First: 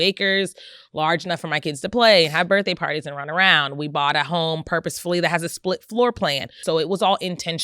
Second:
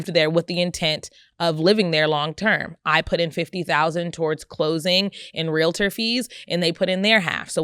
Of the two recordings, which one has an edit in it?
first; 1 cut; at 6.5 s

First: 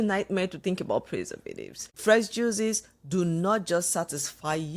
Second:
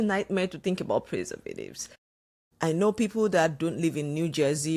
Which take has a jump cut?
first; 1 cut; at 1.9 s

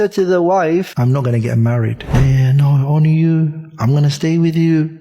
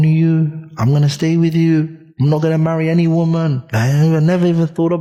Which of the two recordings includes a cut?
first; 2 cuts; at 0.9 s, 2.0 s

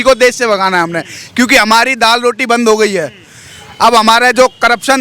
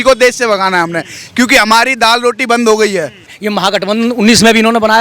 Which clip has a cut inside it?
second; 1 cut; at 3.4 s

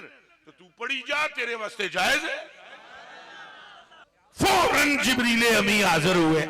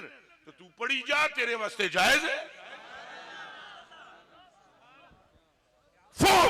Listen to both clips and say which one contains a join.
first; 1 cut; at 4.0 s

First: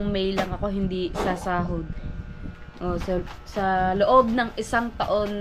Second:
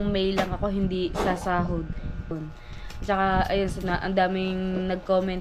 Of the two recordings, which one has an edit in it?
second; 1 cut; at 2.3 s

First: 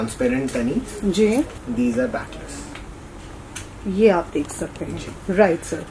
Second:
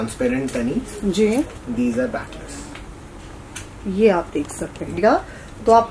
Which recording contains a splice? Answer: second; 1 cut; at 5.0 s

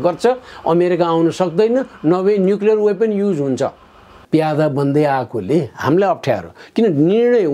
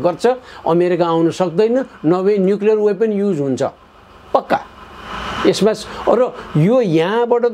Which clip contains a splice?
first; 1 cut; at 4.1 s

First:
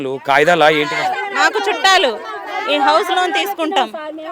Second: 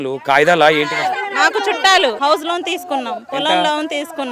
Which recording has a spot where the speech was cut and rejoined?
second; 1 cut; at 2.2 s

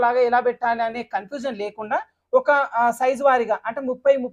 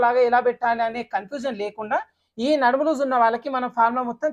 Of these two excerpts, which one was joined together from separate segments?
second; 1 cut; at 2.2 s

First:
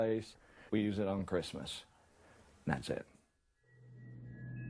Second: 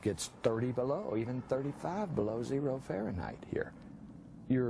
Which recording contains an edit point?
first; 1 cut; at 1.7 s

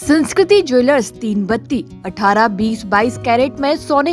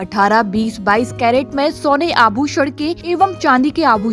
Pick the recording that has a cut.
second; 1 cut; at 3.0 s

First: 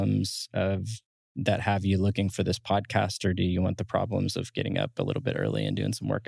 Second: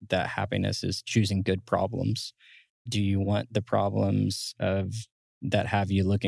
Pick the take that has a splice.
second; 2 cuts; at 1.0 s, 2.7 s

